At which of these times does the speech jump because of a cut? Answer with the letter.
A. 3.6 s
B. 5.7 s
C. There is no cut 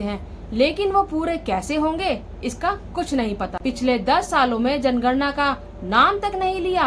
A